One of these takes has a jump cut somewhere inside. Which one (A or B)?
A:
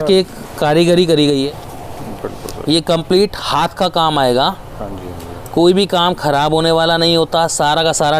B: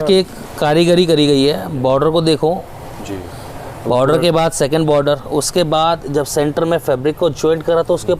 A